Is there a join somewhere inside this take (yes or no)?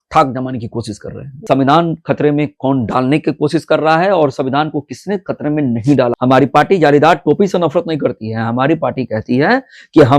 yes